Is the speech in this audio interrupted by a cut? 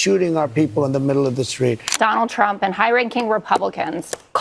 yes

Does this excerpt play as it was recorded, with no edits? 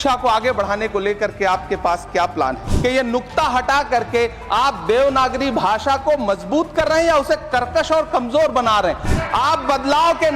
no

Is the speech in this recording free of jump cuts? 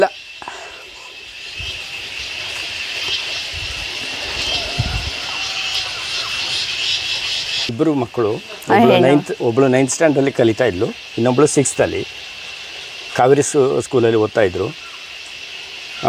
no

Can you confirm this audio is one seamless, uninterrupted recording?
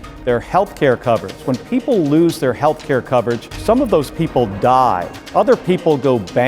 no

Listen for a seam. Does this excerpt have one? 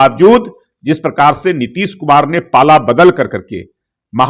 no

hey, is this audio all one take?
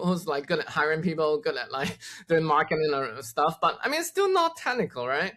yes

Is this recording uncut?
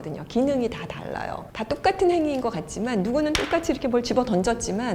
yes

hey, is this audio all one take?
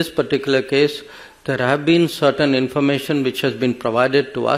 yes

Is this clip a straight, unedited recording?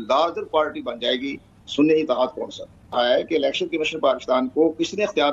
no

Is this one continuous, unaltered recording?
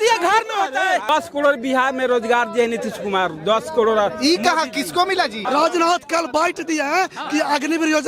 no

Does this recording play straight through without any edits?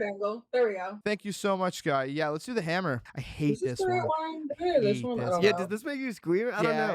no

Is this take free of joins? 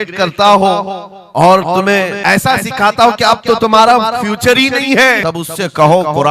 no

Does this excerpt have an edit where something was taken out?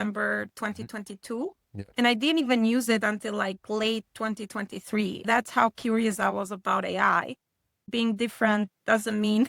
yes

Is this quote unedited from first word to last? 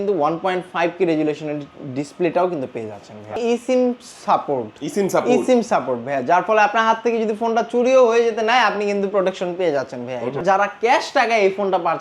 no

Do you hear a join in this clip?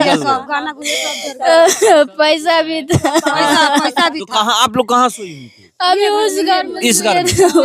no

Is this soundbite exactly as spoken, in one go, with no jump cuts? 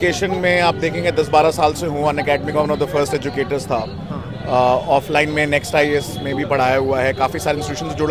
yes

